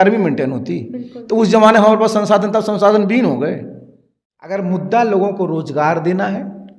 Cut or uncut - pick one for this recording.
cut